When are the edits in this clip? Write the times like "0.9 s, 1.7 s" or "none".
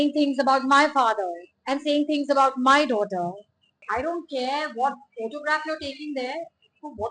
3.8 s